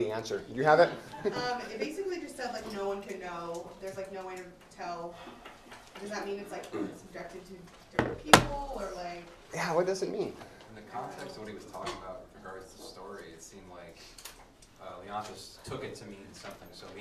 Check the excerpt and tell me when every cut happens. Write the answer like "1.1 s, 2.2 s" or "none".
none